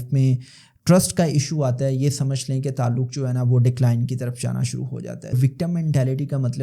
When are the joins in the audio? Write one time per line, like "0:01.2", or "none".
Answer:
0:05.3

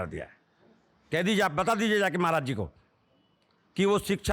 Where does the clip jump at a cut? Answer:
none

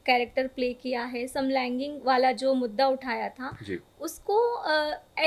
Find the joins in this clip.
none

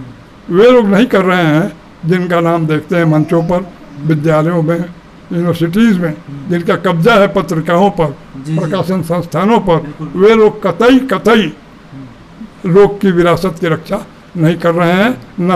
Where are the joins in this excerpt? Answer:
none

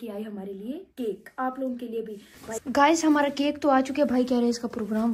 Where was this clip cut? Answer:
0:02.6

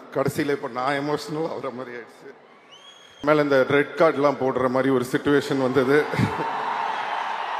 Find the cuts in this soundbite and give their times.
0:03.2

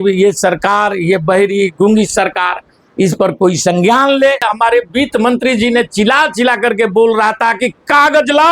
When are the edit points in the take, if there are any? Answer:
0:04.5

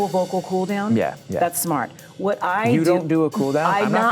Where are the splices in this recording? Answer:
0:01.2

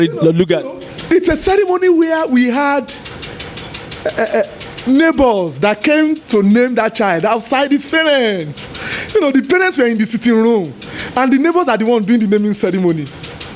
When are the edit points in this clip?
none

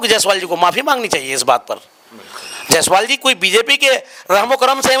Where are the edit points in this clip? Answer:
none

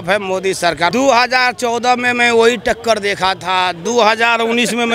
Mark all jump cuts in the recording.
0:00.9

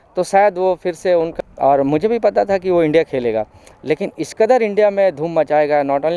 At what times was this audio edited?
0:01.3

